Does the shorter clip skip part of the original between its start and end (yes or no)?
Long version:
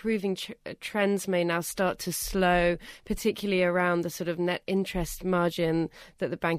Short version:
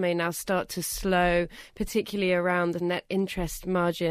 yes